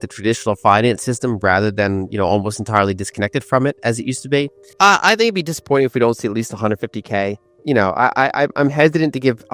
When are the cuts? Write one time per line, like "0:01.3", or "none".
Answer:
0:04.6
0:07.5